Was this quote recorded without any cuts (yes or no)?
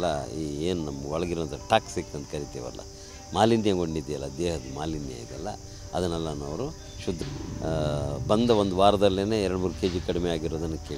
no